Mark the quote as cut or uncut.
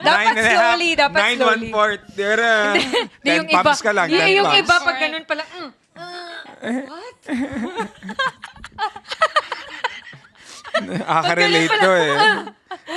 uncut